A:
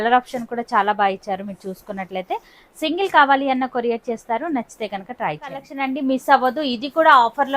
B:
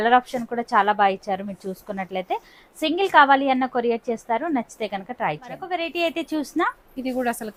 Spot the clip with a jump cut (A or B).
A